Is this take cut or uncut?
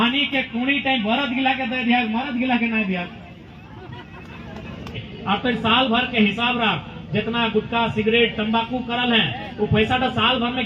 cut